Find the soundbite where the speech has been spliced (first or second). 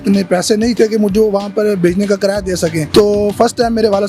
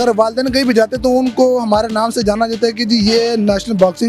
first